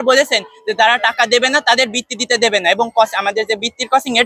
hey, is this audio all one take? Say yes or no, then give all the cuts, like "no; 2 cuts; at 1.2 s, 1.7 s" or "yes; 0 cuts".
yes; 0 cuts